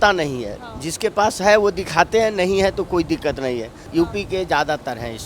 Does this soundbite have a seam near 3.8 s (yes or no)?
yes